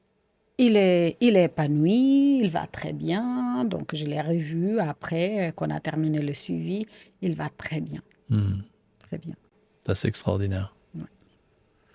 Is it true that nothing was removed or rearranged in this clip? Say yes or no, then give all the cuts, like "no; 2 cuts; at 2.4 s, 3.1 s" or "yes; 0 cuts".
yes; 0 cuts